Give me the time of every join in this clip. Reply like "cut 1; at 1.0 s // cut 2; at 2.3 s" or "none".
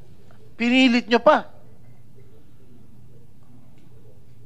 none